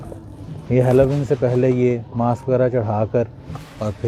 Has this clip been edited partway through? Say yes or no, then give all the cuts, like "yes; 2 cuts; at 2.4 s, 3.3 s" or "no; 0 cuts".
no; 0 cuts